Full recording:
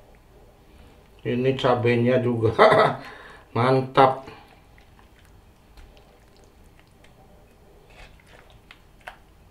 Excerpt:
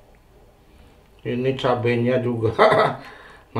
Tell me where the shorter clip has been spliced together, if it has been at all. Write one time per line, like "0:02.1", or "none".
none